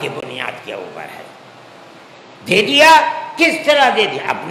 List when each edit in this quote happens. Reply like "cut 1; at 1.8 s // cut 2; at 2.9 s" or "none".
none